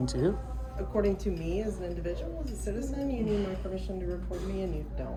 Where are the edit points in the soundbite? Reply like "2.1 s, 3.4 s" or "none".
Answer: none